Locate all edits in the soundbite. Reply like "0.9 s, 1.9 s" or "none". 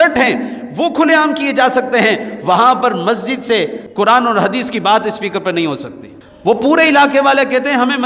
3.8 s, 6.3 s

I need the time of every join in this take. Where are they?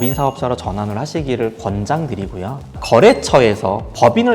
2.7 s

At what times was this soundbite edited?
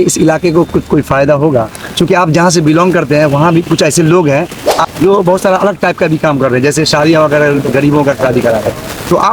4.8 s

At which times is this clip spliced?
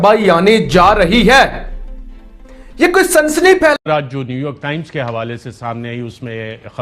3.8 s

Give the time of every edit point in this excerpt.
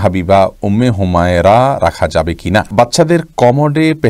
2.7 s

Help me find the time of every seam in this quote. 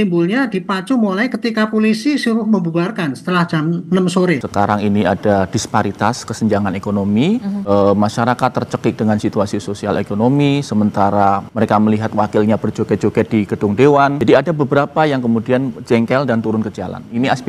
4.5 s, 7.6 s, 11.5 s, 14.2 s

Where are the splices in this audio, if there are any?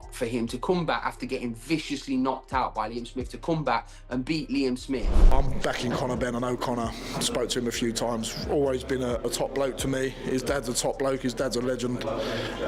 5.2 s

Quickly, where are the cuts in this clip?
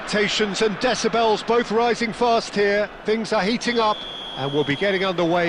none

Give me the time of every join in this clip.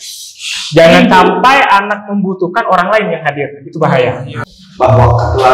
4.3 s

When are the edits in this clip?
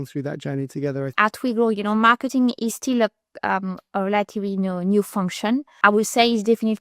1.1 s, 5.7 s

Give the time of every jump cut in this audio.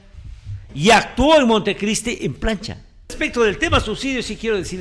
3.1 s

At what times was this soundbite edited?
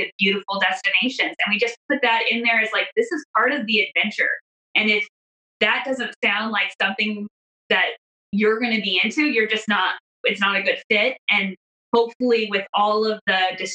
none

